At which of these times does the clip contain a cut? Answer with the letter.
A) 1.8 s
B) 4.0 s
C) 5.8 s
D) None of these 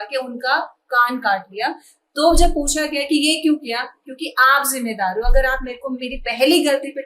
D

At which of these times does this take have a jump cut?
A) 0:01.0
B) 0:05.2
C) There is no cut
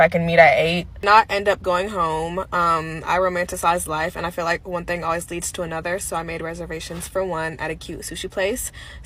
A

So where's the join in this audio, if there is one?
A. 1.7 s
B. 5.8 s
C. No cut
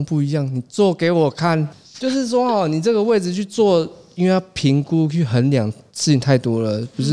A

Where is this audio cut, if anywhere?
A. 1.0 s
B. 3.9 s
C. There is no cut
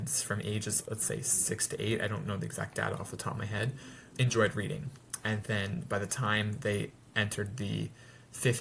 C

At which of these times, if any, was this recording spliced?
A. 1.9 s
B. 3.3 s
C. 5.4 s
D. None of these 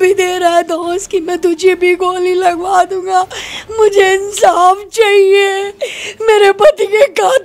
D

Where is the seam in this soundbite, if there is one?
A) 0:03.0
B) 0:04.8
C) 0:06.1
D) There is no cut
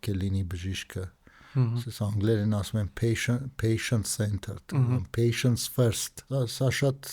C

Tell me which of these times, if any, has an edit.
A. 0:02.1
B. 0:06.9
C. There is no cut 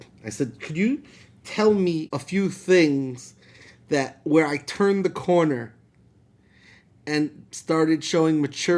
A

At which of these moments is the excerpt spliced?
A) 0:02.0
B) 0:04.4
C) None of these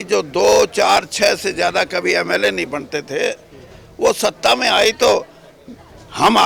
C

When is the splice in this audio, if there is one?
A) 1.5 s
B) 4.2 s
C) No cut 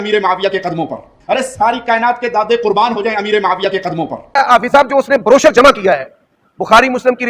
B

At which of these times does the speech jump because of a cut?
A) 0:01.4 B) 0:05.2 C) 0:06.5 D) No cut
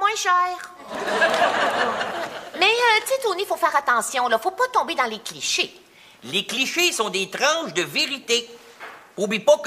B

